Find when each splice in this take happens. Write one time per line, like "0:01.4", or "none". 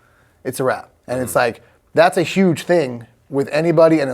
0:00.9